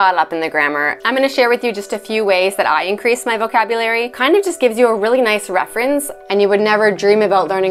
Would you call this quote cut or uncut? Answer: cut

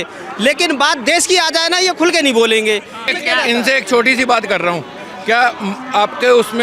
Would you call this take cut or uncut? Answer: cut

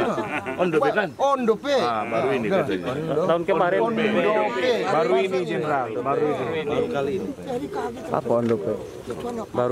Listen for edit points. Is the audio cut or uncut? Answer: uncut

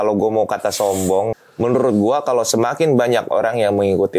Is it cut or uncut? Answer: cut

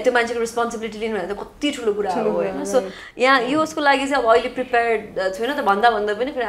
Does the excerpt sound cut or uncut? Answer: uncut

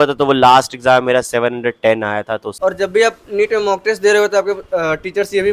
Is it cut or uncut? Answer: cut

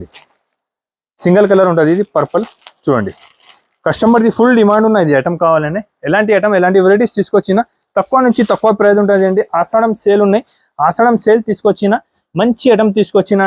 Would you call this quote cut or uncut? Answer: uncut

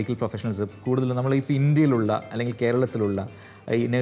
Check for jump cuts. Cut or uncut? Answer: uncut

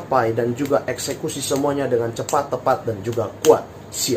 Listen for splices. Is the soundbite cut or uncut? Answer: uncut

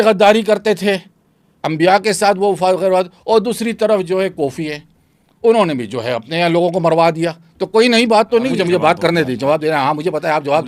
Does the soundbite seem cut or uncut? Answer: cut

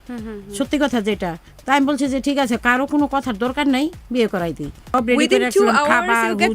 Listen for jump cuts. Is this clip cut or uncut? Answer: cut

